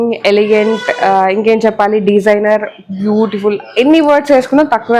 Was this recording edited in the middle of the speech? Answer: no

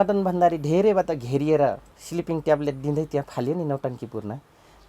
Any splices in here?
yes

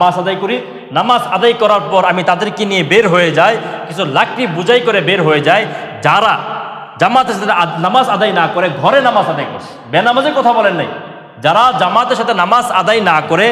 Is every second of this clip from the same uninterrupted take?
yes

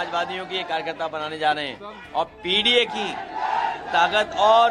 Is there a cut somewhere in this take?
no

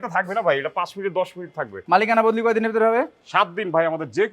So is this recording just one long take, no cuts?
no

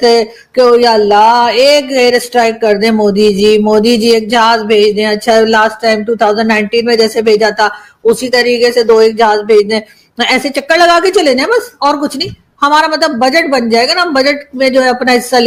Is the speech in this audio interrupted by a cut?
no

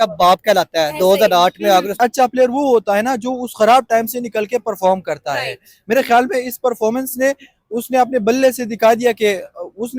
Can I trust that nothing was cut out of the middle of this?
no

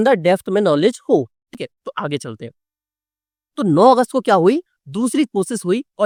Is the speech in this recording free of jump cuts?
yes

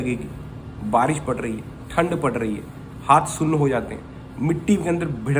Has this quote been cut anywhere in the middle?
no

